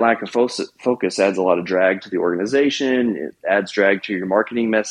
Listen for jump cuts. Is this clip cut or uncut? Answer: uncut